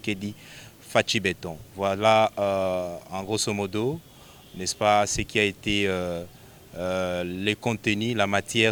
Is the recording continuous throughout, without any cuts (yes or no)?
yes